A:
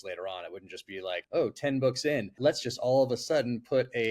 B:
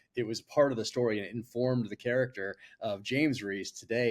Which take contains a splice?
A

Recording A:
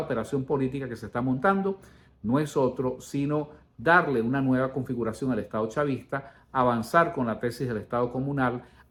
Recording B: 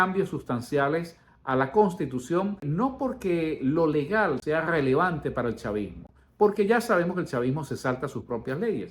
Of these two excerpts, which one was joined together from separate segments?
B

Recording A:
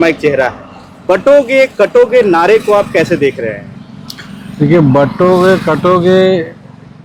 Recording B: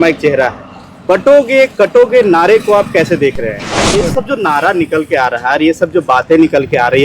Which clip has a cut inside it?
B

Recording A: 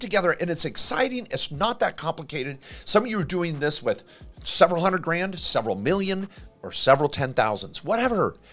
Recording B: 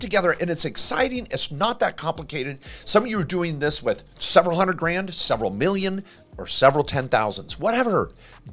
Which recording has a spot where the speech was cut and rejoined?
B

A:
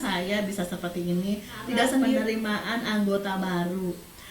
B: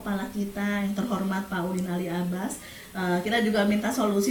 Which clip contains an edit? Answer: A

